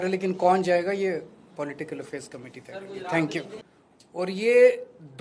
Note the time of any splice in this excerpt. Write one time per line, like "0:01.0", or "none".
0:03.6